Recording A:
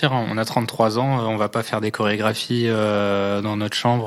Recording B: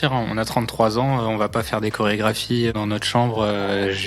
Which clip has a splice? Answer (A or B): B